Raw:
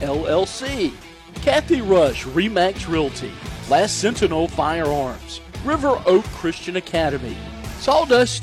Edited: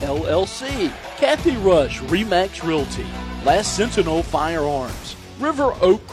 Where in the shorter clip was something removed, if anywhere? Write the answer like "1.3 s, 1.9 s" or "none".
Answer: 1.0 s